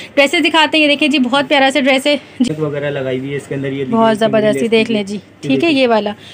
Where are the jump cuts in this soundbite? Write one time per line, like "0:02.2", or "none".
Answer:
0:02.5